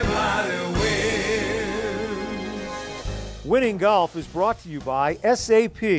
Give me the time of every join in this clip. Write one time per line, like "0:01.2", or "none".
0:03.0

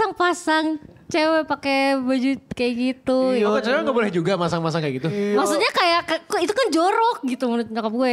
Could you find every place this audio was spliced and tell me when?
none

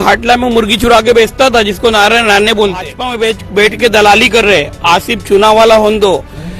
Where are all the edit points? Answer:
0:03.0

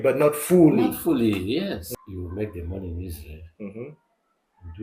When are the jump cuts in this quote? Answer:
0:01.8

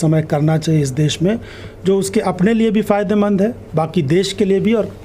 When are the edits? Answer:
none

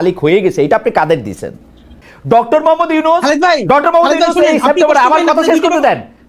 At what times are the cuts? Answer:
0:02.1

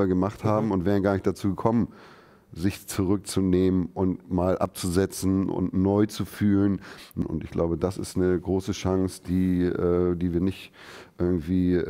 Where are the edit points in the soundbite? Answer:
0:07.2

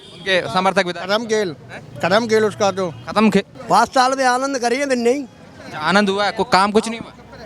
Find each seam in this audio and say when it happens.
0:03.6

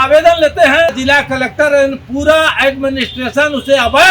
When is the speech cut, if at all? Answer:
0:01.0

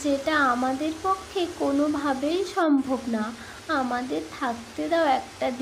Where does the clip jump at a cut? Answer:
none

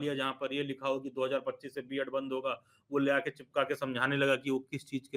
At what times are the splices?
none

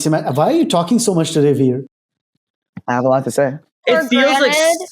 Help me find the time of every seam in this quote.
0:02.7
0:03.8

